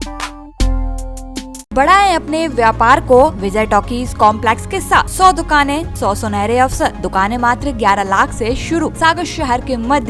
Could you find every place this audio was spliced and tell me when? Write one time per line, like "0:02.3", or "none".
0:01.7
0:03.4
0:05.1
0:05.9
0:07.0
0:08.9